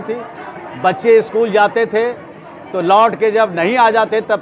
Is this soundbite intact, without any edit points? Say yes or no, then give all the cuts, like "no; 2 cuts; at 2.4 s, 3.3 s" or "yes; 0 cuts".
yes; 0 cuts